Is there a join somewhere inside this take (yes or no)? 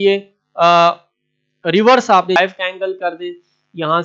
yes